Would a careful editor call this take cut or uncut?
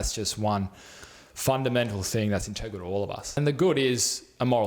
cut